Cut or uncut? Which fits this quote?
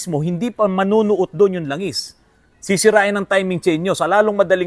uncut